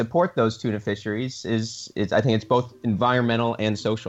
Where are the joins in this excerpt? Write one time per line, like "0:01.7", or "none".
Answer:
none